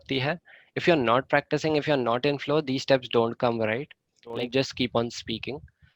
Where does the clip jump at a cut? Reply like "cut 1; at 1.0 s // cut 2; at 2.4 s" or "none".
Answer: cut 1; at 4.5 s